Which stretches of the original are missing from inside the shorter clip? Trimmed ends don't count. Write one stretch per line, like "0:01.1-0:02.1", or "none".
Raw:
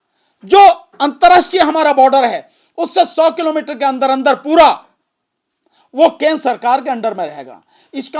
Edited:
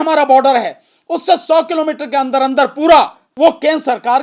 0:04.9-0:05.8